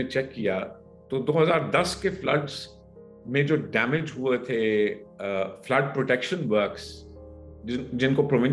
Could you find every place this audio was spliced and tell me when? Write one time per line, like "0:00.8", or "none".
none

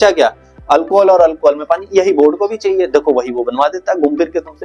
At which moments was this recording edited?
none

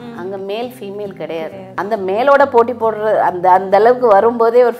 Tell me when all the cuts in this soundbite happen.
0:01.6

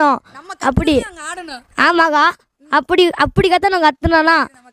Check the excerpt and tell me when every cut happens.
none

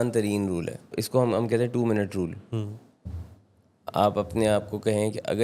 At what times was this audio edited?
0:00.9

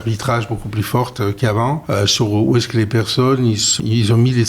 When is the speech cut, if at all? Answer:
0:01.8
0:03.8

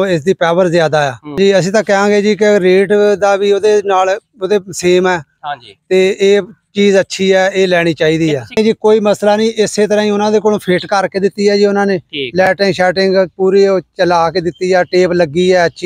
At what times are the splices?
0:01.4
0:08.6

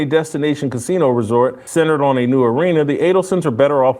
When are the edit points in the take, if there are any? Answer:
0:01.6

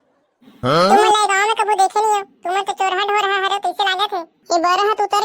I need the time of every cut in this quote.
0:04.3

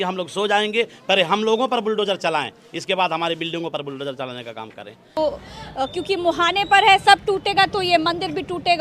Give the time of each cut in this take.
0:05.2

